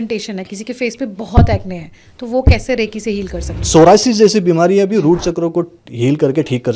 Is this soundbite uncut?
no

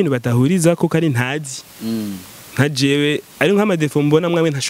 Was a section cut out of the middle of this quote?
no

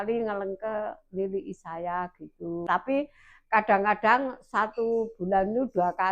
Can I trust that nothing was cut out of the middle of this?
no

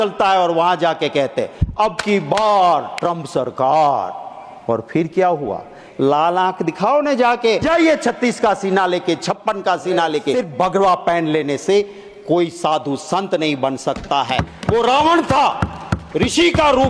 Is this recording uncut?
no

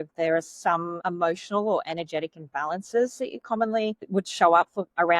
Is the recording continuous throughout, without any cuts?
no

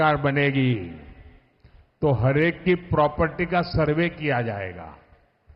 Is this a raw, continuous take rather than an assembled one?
yes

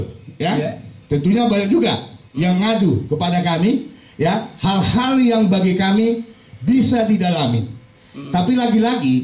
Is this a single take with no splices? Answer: yes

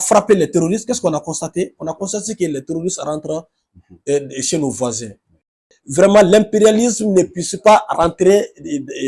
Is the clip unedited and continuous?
no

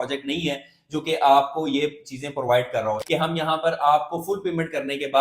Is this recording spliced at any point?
yes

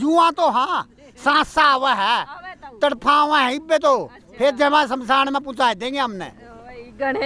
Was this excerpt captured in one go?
yes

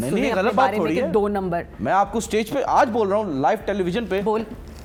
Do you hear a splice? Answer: no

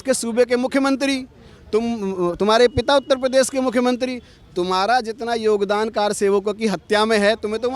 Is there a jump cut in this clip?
no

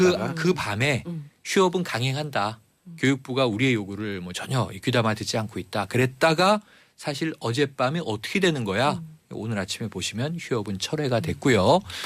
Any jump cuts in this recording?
yes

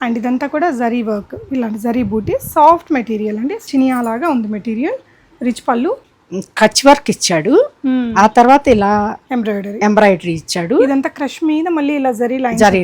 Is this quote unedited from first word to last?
no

